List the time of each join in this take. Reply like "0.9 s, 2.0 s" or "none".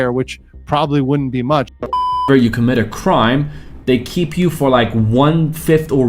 2.1 s